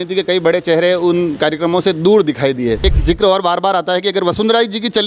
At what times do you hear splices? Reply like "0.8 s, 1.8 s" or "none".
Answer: 2.8 s